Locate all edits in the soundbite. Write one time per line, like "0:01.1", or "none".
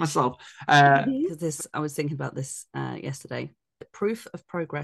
0:01.4
0:03.9